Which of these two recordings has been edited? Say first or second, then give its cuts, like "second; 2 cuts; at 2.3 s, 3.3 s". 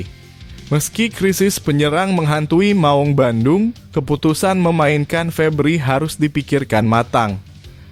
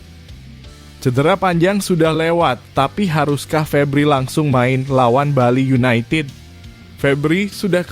second; 1 cut; at 1.0 s